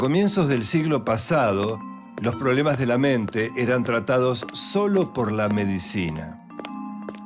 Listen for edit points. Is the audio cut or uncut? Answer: uncut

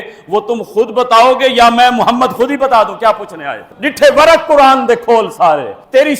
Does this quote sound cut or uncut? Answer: uncut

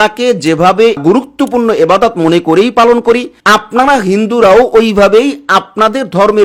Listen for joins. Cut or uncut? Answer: uncut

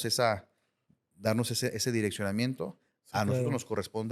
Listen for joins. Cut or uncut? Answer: uncut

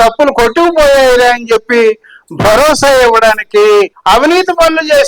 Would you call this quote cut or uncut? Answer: cut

